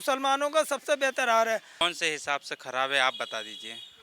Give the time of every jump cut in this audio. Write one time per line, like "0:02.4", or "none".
0:01.8